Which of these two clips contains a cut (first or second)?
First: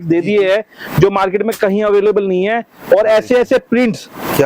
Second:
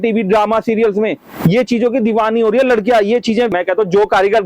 second